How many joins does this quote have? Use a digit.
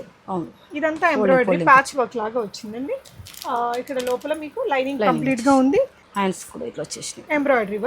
1